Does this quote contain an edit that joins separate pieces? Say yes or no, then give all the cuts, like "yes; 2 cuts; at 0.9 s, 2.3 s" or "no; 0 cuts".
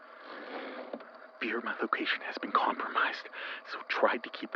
yes; 1 cut; at 1.3 s